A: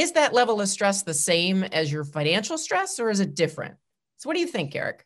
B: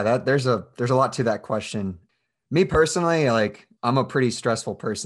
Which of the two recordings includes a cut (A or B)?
B